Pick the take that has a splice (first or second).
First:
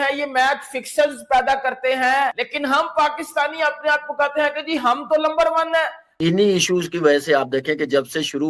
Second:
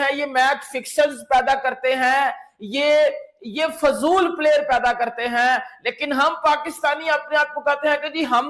first